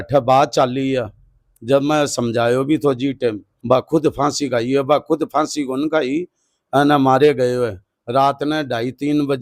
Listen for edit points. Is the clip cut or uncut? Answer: cut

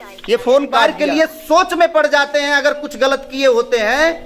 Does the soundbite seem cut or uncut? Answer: cut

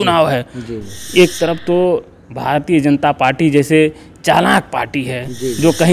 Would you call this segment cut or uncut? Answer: uncut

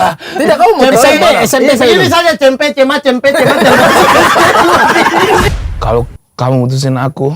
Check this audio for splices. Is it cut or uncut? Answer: cut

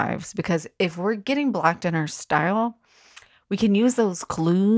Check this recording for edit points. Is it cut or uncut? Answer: uncut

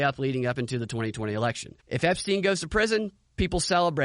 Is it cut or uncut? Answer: cut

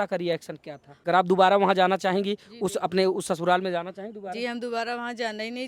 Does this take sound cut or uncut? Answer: cut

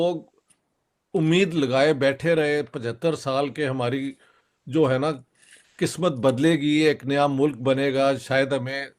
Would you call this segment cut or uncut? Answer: uncut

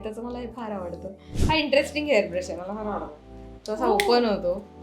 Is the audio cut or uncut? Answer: cut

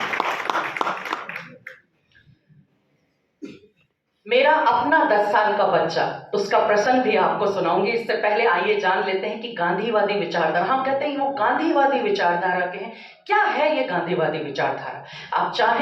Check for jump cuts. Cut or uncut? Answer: uncut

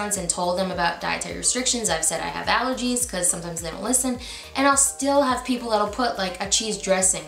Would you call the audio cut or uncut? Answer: uncut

